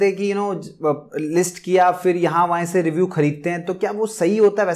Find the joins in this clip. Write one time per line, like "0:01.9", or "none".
none